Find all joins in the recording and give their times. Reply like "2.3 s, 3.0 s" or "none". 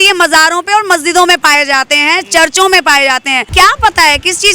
3.5 s